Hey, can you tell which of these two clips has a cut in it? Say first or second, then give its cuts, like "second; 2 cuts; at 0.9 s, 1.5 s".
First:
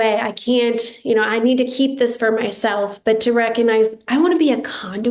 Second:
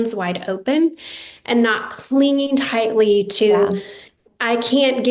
second; 1 cut; at 4.2 s